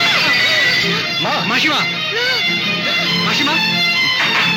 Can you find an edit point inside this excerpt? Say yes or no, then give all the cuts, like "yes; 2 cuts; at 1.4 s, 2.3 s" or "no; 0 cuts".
no; 0 cuts